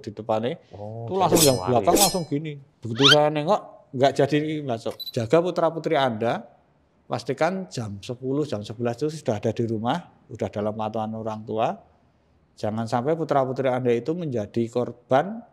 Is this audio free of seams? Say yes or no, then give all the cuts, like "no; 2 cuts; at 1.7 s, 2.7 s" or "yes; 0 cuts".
no; 1 cut; at 5.0 s